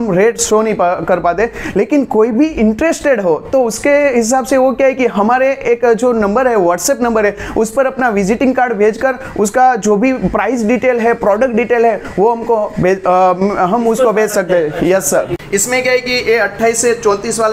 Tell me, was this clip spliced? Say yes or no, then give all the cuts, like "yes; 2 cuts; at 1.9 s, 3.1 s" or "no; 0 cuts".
yes; 1 cut; at 15.4 s